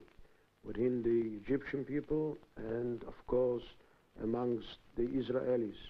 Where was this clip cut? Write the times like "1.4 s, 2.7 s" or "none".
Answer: 4.1 s